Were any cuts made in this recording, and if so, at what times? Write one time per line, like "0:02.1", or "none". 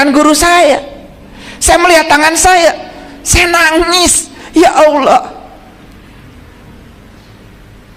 none

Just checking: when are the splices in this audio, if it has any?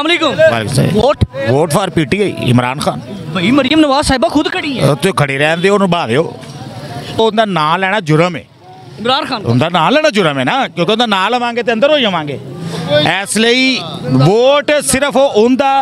0:07.2

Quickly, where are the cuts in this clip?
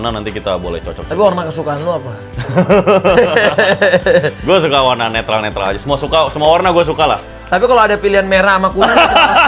none

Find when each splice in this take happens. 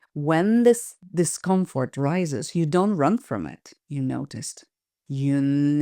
0:01.0

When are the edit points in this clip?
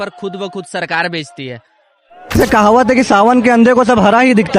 0:02.4

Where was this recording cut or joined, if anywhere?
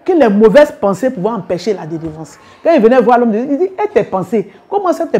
none

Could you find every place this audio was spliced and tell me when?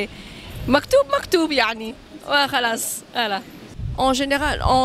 0:03.8

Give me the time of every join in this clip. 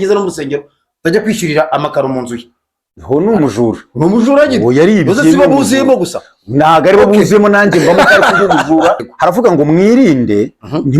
0:09.1

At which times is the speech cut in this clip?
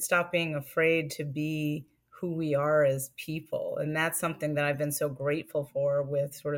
none

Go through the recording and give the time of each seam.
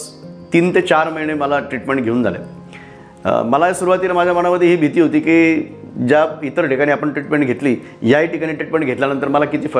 none

